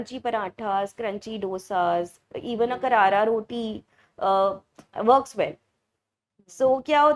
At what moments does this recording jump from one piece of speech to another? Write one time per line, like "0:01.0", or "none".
none